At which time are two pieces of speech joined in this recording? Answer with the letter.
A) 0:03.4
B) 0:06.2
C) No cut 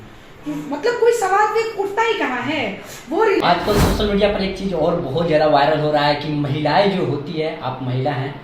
A